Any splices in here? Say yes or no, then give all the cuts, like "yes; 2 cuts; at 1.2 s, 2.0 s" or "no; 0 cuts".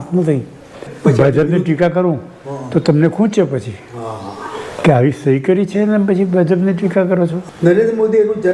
yes; 2 cuts; at 0.9 s, 7.4 s